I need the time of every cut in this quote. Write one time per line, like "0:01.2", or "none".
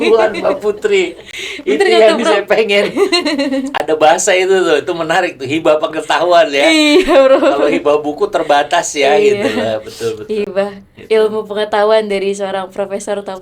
none